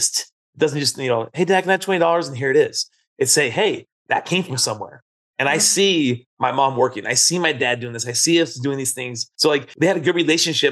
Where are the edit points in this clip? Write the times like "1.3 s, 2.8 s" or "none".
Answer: 9.5 s